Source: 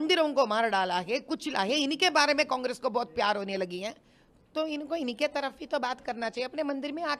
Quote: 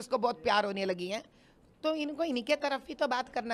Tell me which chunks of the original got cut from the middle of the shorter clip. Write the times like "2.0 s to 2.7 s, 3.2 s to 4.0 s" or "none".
none

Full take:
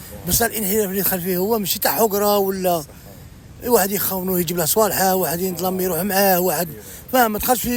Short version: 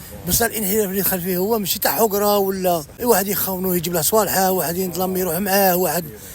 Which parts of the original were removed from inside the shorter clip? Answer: 2.9 s to 3.5 s

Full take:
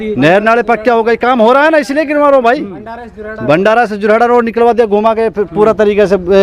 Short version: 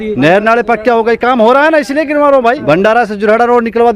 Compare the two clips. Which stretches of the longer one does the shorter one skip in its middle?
2.6 s to 3.4 s

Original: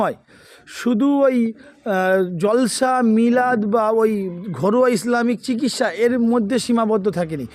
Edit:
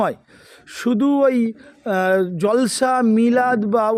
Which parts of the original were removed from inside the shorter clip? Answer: none

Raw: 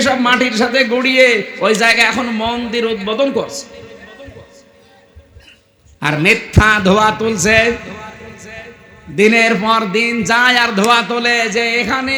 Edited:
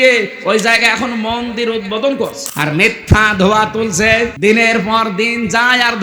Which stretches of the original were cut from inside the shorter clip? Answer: 3.6 s to 5.9 s, 7.8 s to 9.1 s

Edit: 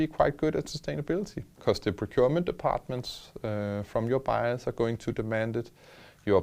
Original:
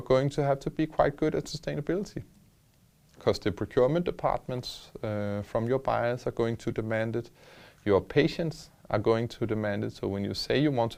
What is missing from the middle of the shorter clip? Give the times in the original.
2.2 s to 3.0 s

